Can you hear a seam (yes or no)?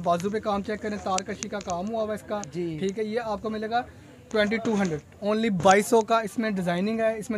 no